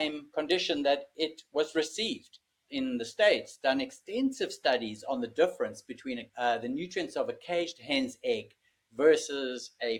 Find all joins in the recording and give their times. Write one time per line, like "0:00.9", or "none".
0:02.6
0:06.2